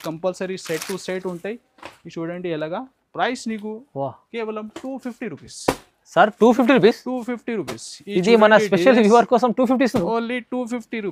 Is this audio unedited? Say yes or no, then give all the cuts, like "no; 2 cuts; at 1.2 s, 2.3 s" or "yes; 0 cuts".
yes; 0 cuts